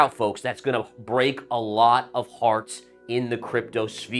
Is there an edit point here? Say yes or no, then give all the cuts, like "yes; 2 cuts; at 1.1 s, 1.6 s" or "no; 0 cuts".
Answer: no; 0 cuts